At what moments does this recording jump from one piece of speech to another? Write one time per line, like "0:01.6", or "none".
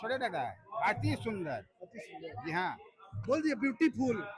none

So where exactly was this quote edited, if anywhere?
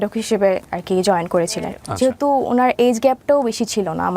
0:01.8

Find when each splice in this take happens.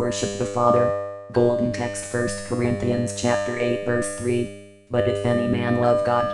0:01.1
0:02.0

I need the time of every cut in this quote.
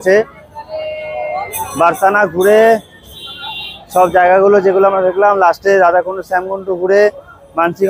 none

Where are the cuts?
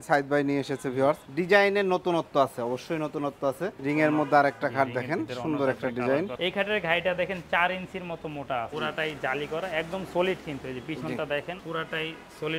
0:01.3
0:03.8
0:06.3
0:08.7
0:11.6

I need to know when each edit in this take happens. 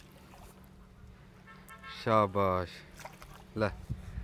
none

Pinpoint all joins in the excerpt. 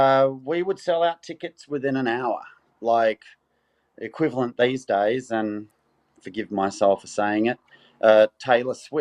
none

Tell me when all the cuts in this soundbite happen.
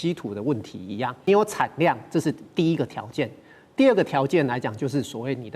0:01.3

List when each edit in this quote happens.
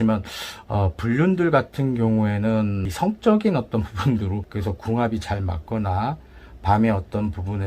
0:02.9
0:04.5

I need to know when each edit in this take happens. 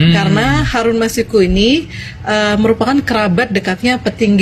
none

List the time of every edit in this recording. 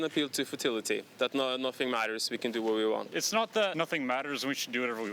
0:03.4

